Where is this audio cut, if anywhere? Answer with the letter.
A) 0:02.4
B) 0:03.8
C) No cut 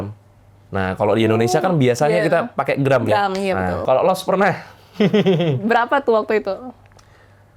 B